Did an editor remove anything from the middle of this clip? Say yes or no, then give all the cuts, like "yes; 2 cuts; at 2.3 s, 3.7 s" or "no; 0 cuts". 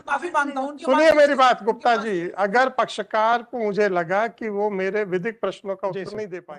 no; 0 cuts